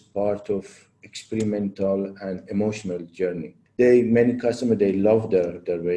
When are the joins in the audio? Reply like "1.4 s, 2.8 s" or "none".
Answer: 3.6 s